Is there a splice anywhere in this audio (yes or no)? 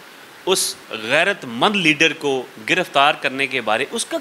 no